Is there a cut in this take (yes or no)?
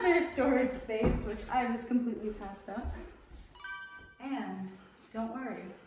no